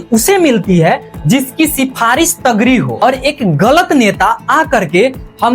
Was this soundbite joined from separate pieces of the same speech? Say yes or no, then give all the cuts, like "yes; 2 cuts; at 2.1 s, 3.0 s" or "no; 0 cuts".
yes; 1 cut; at 2.9 s